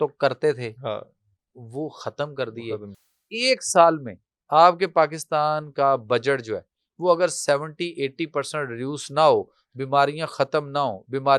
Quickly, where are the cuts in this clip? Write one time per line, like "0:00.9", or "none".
0:03.0